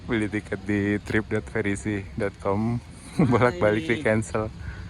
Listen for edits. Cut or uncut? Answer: cut